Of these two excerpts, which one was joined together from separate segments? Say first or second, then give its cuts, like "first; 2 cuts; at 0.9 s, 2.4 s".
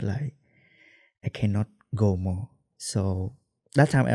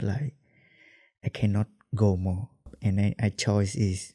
second; 1 cut; at 2.7 s